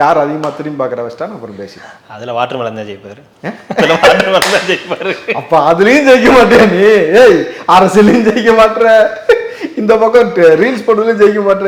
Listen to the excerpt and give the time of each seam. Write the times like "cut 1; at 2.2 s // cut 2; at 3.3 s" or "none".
none